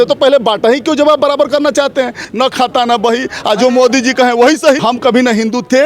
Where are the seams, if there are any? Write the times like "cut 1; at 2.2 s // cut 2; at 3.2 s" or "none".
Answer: cut 1; at 2.2 s // cut 2; at 4.8 s